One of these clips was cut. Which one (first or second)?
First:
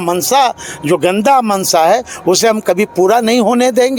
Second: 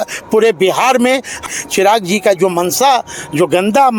second